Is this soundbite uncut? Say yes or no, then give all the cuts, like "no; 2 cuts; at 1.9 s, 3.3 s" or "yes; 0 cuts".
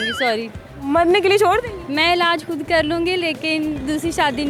yes; 0 cuts